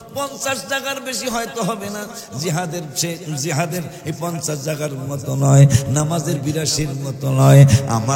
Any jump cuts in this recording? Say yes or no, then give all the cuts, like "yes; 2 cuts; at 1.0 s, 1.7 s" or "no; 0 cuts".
no; 0 cuts